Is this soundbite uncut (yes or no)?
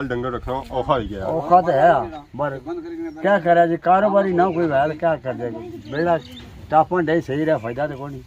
yes